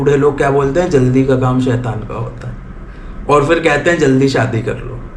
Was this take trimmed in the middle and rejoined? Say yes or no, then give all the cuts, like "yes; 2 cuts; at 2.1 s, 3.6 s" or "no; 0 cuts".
no; 0 cuts